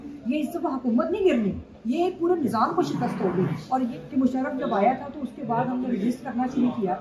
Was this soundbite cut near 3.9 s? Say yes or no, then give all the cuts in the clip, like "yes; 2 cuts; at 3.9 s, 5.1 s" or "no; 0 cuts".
yes; 1 cut; at 3.9 s